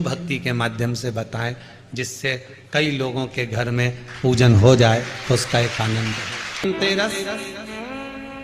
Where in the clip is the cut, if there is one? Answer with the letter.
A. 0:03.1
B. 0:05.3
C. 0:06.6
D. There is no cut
C